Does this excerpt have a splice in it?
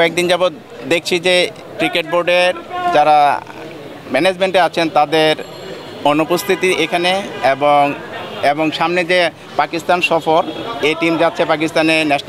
no; 0 cuts

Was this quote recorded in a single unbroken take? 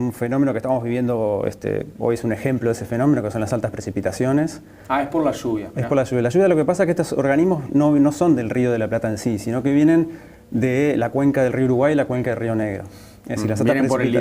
no; 1 cut; at 9.5 s

